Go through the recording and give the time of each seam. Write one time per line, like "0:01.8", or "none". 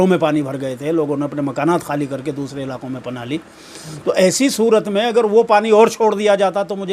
none